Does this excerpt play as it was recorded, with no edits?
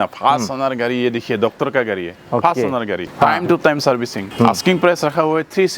no; 3 cuts; at 2.1 s, 3.1 s, 4.2 s

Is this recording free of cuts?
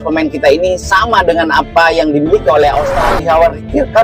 no; 1 cut; at 3.0 s

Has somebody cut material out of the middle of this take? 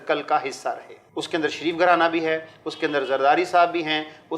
yes; 1 cut; at 1.0 s

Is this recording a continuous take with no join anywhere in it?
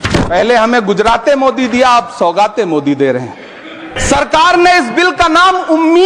no; 1 cut; at 4.0 s

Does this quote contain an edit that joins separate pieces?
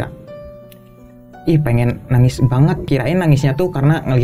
yes; 1 cut; at 2.9 s

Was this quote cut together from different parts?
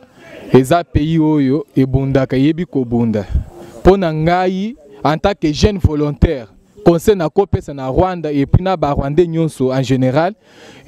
no; 0 cuts

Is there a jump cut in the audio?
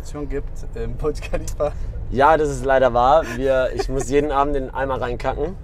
no; 0 cuts

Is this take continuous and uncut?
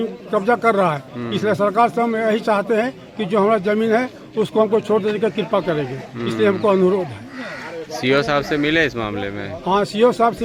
yes; 0 cuts

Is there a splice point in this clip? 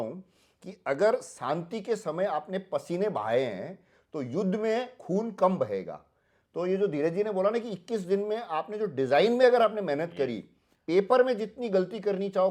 no; 0 cuts

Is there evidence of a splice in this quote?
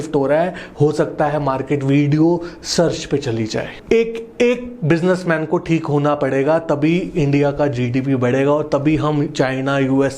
yes; 1 cut; at 3.7 s

